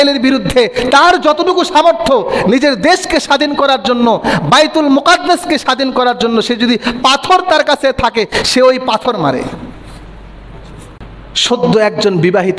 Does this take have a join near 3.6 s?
no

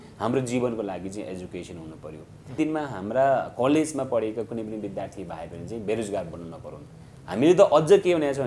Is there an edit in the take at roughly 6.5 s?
no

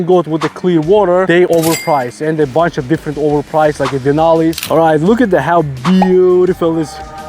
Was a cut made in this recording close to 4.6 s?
yes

